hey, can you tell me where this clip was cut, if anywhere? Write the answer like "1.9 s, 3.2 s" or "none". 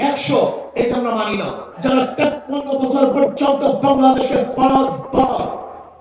1.7 s